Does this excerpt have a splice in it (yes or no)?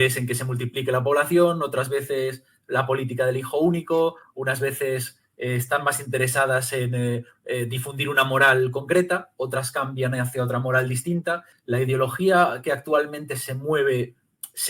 yes